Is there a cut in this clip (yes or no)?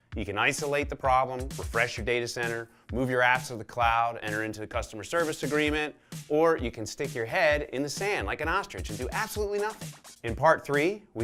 no